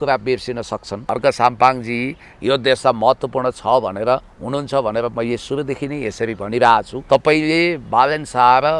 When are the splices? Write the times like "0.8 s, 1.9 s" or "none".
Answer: 1.1 s, 6.9 s